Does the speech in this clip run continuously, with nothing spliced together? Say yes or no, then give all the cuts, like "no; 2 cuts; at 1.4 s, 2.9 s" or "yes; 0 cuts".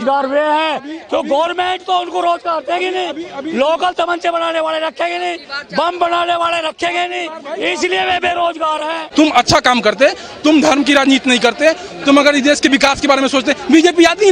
no; 1 cut; at 9.0 s